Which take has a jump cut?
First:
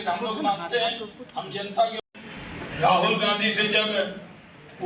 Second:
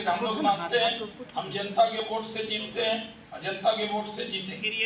first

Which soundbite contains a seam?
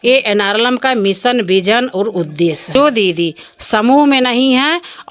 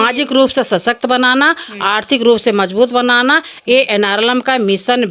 first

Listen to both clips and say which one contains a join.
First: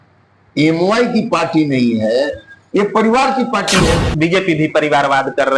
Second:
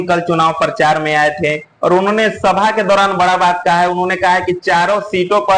first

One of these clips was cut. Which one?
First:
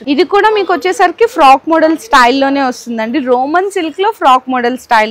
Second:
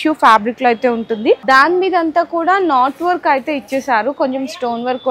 second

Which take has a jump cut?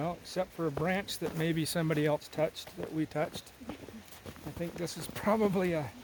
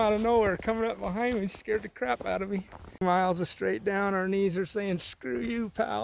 second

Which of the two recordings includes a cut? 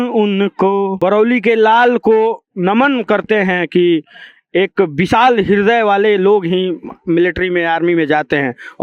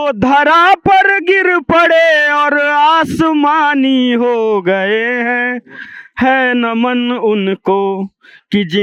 first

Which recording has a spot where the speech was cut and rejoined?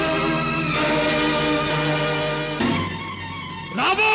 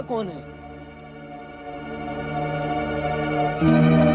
first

